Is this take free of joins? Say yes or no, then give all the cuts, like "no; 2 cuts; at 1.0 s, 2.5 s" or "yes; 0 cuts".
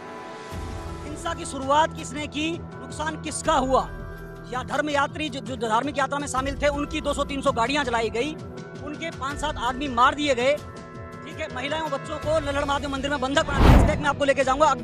no; 1 cut; at 13.7 s